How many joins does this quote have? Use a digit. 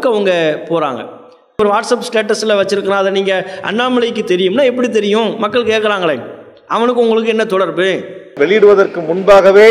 2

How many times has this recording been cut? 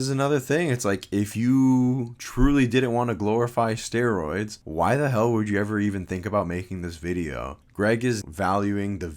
2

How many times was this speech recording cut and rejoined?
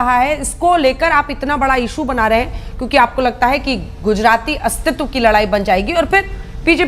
0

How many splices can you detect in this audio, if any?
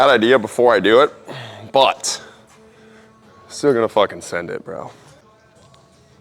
1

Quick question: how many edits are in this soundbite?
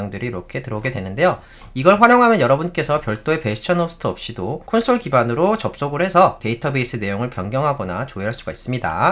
1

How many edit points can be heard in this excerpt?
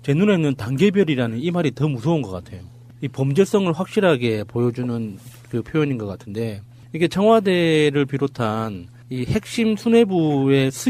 1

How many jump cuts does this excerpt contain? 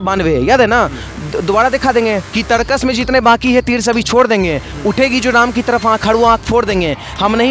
1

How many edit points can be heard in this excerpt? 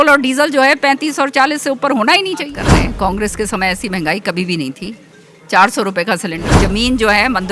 2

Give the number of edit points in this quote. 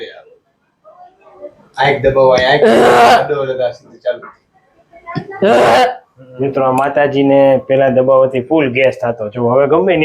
1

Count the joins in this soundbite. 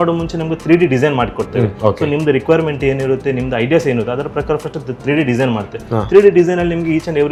0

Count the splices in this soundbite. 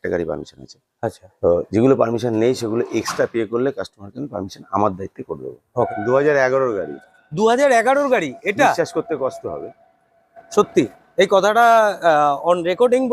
1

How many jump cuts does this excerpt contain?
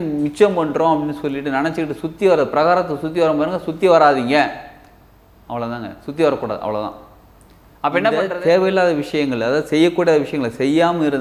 1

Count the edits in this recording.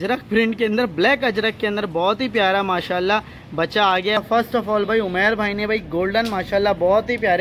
1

